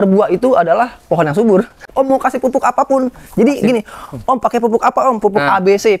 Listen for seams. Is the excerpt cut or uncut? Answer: cut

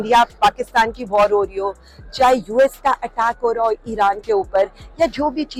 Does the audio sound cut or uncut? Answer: uncut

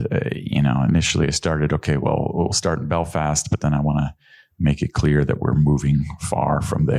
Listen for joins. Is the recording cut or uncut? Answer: uncut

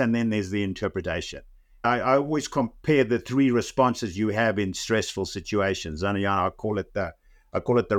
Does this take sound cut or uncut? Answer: cut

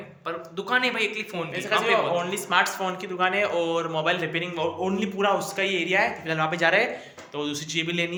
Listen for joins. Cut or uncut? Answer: uncut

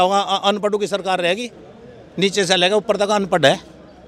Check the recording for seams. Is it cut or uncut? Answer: uncut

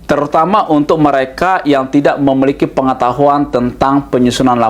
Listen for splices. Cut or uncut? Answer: uncut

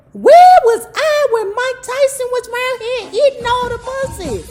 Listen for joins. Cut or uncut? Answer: uncut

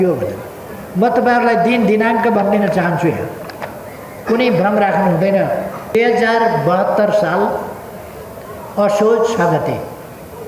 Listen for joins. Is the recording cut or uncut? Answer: cut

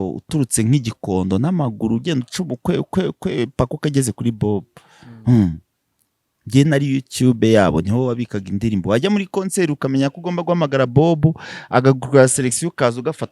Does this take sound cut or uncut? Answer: uncut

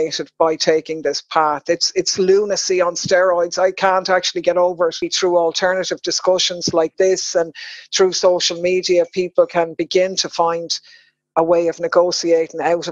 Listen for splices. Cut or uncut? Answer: cut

